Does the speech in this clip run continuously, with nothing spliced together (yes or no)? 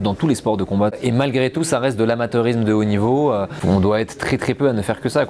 no